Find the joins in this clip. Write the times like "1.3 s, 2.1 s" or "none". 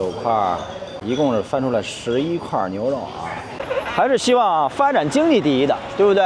0.9 s, 3.6 s